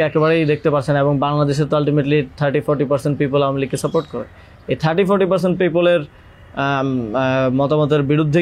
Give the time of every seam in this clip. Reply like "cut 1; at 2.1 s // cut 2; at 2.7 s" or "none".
none